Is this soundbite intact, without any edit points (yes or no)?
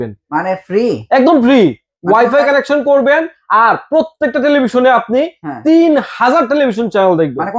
yes